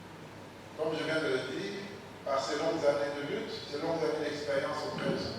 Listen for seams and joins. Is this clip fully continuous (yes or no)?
yes